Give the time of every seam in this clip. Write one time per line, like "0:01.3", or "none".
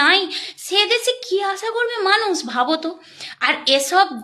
none